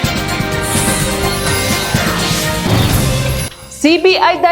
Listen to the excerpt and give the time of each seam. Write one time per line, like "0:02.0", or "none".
none